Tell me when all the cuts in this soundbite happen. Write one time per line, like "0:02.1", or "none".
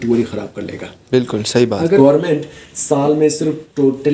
0:02.0